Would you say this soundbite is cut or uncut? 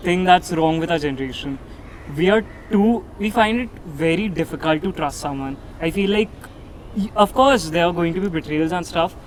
uncut